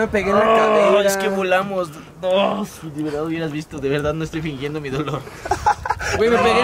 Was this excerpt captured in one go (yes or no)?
yes